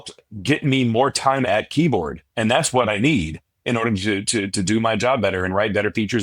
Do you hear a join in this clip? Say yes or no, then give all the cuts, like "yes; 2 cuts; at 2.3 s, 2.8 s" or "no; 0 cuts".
no; 0 cuts